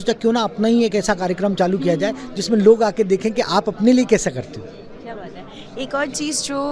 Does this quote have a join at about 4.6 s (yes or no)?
no